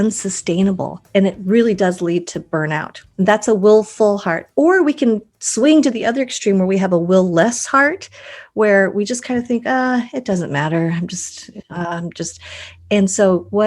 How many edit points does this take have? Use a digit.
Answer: 2